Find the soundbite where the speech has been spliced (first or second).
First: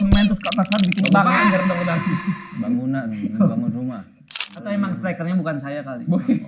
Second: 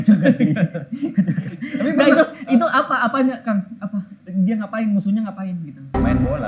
first